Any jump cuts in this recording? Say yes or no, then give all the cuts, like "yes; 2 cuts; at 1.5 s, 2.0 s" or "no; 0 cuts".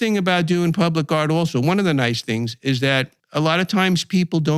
no; 0 cuts